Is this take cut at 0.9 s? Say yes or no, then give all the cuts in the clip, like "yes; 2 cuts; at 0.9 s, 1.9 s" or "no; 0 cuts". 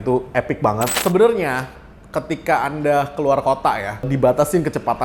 yes; 2 cuts; at 0.9 s, 4.1 s